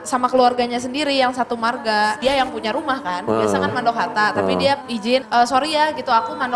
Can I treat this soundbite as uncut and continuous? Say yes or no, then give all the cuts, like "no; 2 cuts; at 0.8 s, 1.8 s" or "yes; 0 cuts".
no; 2 cuts; at 2.2 s, 5.0 s